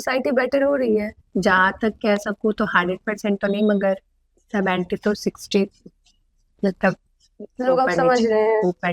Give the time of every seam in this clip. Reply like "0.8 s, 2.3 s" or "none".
1.2 s